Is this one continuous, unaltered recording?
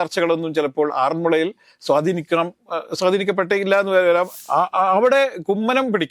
no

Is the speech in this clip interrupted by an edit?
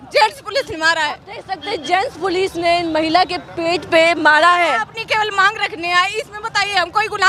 no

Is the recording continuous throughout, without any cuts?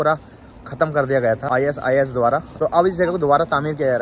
no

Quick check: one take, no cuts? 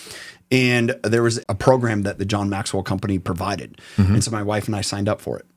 no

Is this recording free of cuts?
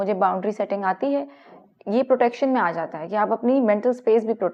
yes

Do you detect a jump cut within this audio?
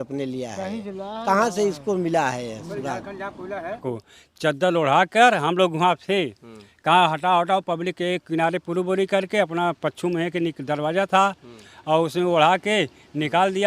yes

